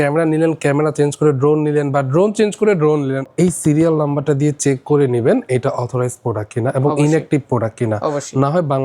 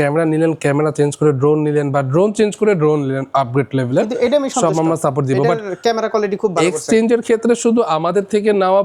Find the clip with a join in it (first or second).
first